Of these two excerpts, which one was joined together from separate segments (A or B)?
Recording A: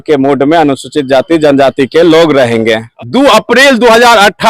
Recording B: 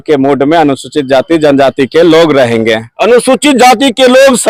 A